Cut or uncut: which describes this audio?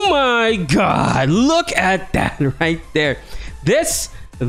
uncut